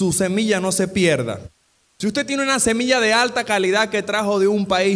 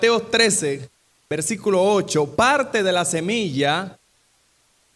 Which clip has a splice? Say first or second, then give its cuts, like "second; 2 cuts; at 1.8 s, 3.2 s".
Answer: first; 1 cut; at 1.4 s